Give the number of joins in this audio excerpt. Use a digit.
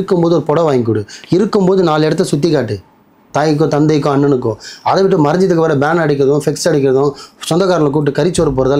0